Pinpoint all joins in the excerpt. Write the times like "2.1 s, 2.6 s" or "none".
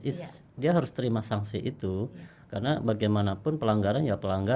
none